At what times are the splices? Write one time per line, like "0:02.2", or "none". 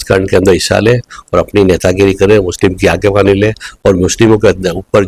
none